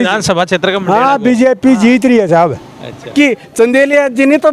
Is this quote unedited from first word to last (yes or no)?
no